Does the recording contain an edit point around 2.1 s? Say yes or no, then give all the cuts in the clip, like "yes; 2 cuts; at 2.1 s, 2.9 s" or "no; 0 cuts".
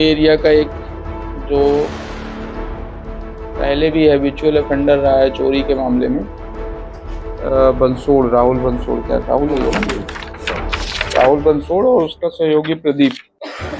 yes; 2 cuts; at 2.1 s, 3.6 s